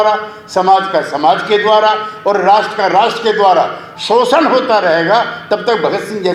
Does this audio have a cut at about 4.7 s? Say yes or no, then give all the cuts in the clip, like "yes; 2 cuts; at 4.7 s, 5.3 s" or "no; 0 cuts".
no; 0 cuts